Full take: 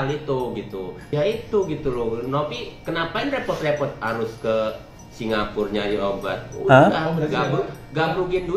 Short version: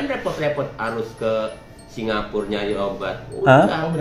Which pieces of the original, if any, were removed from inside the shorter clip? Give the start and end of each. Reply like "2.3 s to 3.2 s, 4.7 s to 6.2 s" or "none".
none